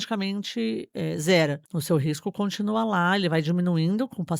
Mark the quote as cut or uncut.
cut